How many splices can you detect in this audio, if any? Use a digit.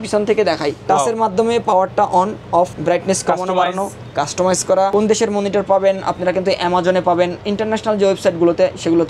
3